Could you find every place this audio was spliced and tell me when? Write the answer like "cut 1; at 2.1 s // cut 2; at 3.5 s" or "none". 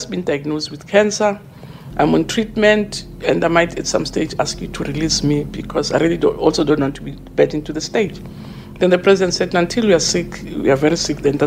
none